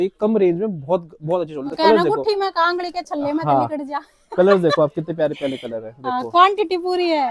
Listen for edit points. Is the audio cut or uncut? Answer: uncut